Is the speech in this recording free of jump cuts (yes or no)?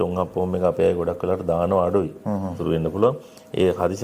no